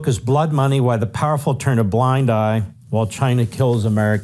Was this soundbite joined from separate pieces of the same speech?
no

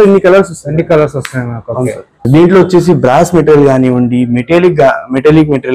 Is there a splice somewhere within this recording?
yes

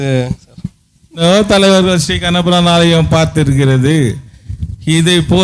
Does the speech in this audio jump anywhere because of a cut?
yes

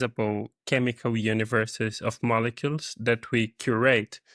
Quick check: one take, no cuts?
yes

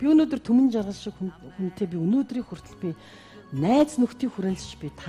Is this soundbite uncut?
yes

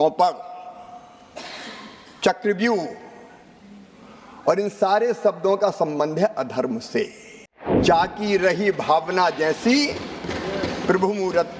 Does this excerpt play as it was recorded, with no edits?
no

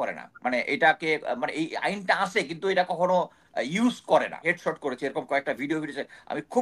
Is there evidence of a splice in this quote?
yes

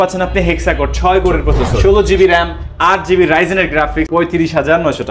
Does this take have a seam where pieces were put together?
yes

